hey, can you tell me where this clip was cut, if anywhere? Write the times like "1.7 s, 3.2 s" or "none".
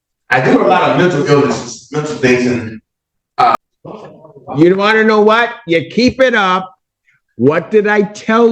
3.6 s